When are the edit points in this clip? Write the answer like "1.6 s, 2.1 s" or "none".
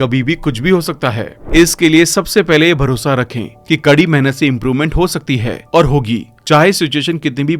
1.3 s